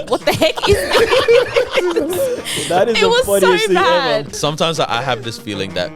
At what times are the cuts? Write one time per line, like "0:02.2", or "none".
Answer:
0:04.3